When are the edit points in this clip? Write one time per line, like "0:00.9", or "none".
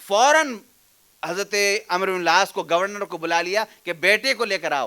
none

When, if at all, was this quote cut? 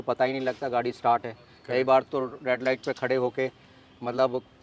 none

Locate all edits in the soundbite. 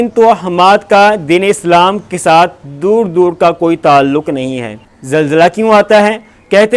none

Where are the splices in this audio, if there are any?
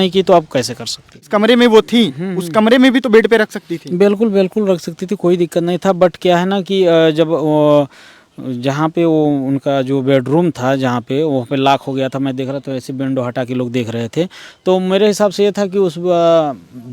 0:01.2

